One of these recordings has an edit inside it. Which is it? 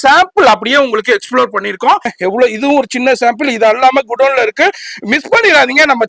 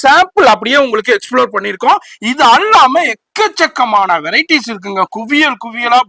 first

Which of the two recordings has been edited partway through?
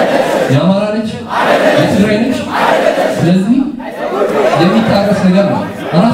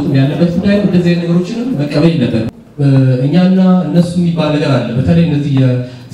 second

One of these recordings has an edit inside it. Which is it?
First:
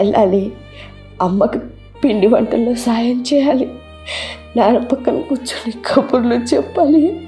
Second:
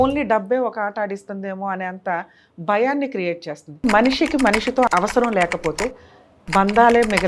second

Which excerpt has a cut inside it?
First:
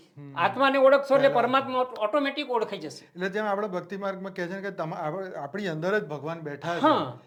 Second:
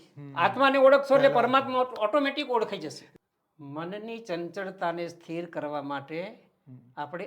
second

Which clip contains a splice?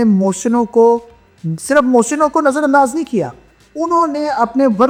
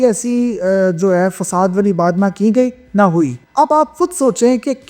second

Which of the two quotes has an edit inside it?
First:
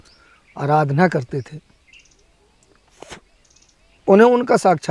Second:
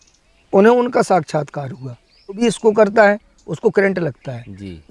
second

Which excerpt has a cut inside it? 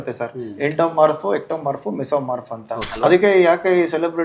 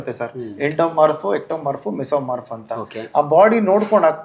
first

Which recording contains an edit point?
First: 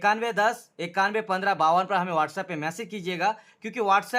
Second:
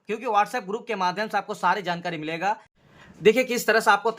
second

